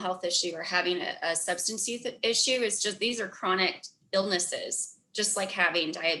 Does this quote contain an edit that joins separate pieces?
no; 0 cuts

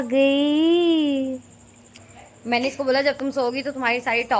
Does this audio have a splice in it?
no; 0 cuts

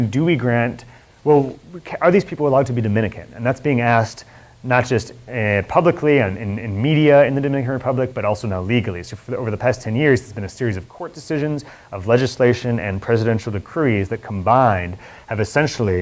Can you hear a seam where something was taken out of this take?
no; 0 cuts

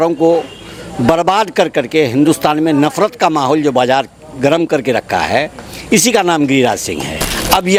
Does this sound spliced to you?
no; 0 cuts

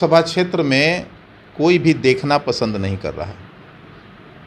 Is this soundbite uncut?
yes; 0 cuts

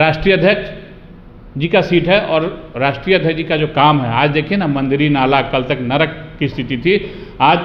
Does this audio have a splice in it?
no; 0 cuts

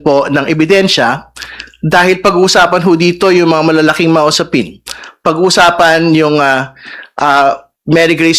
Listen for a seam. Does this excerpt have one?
no; 0 cuts

